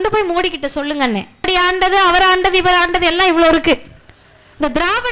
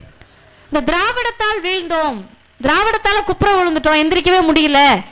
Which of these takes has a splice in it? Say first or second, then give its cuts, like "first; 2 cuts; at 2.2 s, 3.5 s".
first; 1 cut; at 1.5 s